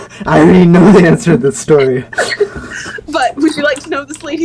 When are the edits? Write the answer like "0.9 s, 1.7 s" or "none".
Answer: 2.1 s